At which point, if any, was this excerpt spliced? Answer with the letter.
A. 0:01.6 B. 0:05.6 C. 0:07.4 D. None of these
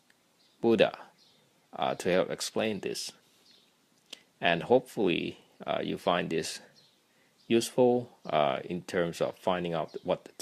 D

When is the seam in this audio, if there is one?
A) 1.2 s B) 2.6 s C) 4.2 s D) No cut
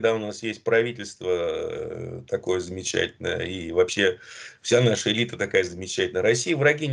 D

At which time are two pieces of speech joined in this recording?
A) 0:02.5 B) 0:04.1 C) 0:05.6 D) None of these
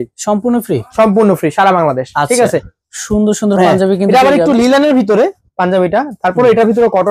A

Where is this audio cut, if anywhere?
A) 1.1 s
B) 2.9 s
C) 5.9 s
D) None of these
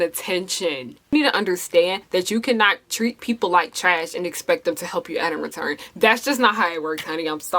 A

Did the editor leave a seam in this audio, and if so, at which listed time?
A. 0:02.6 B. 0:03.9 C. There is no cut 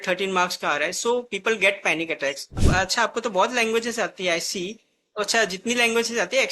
A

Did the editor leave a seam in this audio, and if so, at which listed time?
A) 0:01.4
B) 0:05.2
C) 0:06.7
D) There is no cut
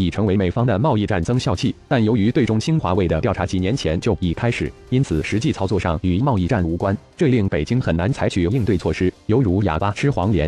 A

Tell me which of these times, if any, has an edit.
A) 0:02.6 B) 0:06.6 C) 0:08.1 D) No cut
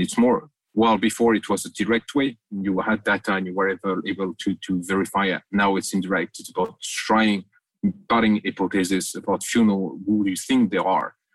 D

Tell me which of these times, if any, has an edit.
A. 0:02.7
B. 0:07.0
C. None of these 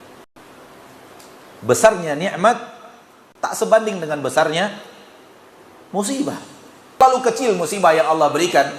B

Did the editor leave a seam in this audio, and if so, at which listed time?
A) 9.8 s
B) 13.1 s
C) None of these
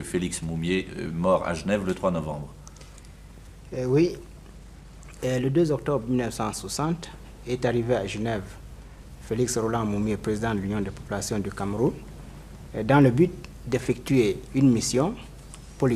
B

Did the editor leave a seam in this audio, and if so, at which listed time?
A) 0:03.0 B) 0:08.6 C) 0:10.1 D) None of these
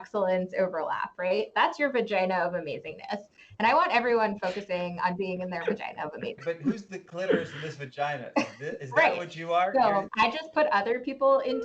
C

